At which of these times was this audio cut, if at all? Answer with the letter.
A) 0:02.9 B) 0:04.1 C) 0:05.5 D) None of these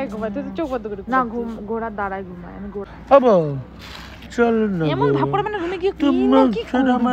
A